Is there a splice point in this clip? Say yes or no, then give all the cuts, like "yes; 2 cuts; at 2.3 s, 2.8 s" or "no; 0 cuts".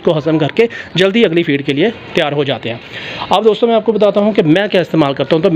no; 0 cuts